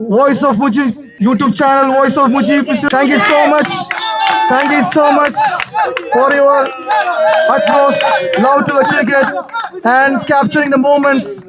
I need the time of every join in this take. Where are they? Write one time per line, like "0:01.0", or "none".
0:01.1
0:02.8